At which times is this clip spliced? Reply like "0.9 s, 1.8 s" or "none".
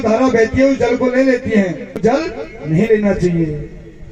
2.0 s